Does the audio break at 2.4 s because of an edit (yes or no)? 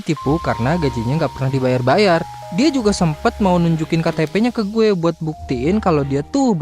yes